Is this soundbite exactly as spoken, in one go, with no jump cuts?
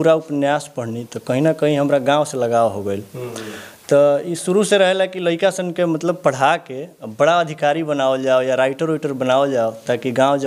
yes; 0 cuts

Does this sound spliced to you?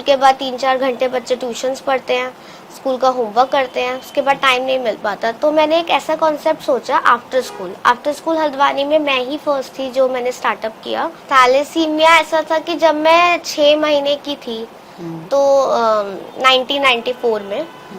yes; 1 cut; at 11.2 s

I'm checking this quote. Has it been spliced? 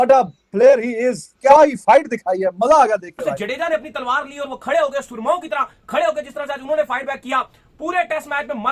yes; 2 cuts; at 1.3 s, 3.4 s

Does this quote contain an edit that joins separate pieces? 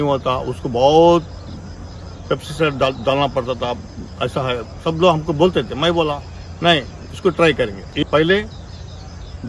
yes; 1 cut; at 7.9 s

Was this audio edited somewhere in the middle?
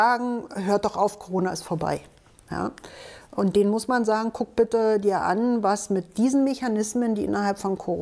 no; 0 cuts

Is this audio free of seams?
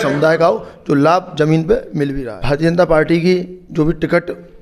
no; 1 cut; at 2.3 s

